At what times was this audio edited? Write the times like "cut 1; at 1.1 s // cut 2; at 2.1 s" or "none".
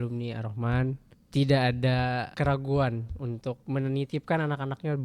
cut 1; at 1.1 s // cut 2; at 2.3 s // cut 3; at 3.6 s